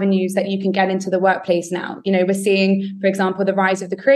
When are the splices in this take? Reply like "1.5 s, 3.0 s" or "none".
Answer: none